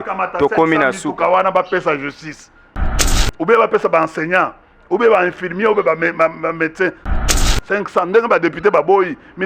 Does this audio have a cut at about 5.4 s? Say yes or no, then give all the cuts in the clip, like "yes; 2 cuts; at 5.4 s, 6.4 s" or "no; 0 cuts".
no; 2 cuts; at 2.8 s, 7.2 s